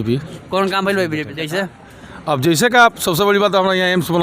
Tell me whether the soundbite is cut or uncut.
cut